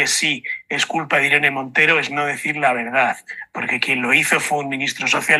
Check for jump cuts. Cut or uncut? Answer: uncut